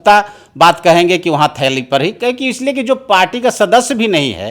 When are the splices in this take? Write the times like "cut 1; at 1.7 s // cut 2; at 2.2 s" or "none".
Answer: none

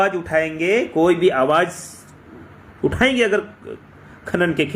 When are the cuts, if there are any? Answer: none

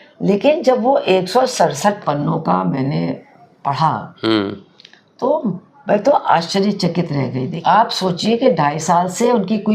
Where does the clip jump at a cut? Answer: cut 1; at 7.5 s

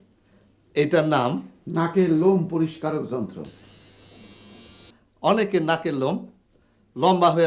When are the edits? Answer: cut 1; at 4.9 s

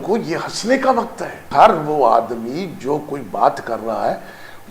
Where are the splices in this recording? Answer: cut 1; at 1.5 s

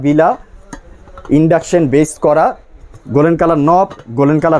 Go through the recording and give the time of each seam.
none

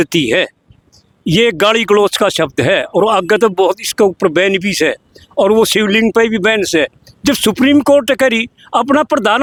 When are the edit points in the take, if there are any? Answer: none

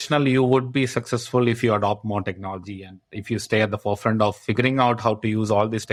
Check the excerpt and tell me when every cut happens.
none

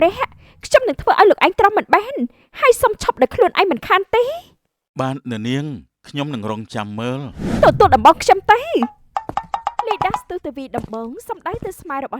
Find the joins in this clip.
cut 1; at 7.4 s

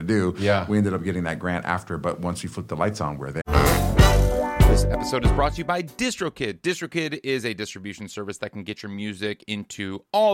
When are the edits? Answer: cut 1; at 3.4 s

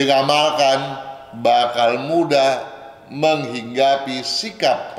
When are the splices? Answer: none

